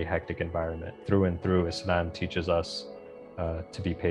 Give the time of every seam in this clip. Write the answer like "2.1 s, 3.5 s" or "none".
1.0 s